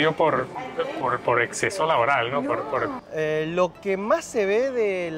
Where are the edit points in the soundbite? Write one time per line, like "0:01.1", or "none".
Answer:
0:03.0